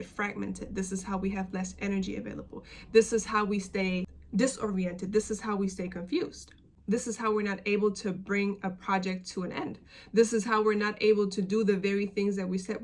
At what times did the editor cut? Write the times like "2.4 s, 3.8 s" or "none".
4.2 s